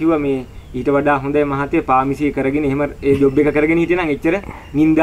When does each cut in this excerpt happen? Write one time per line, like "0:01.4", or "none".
none